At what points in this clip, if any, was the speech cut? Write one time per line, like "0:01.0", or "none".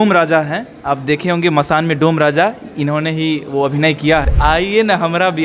0:04.3